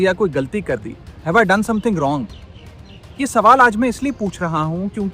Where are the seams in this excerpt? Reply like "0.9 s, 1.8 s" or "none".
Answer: none